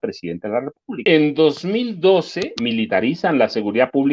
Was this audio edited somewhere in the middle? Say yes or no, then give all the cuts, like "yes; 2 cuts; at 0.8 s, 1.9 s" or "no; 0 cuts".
yes; 2 cuts; at 1.0 s, 2.5 s